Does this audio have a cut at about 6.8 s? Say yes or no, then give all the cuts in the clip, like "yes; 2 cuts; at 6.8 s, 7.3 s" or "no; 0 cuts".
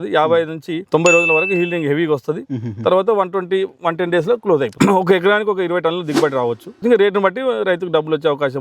yes; 2 cuts; at 4.7 s, 6.8 s